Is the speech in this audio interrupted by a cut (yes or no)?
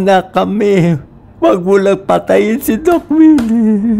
no